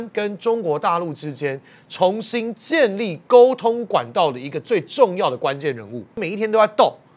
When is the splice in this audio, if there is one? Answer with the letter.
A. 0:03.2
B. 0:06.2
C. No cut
B